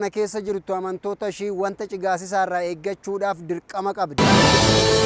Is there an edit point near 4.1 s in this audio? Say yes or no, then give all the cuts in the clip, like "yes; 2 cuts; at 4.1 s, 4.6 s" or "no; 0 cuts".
yes; 1 cut; at 4.1 s